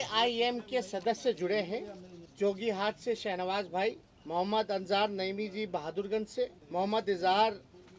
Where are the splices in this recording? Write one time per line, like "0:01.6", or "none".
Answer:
0:06.6